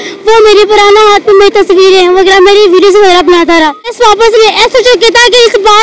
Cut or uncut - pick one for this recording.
cut